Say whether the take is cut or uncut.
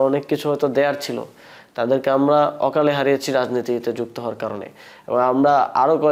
uncut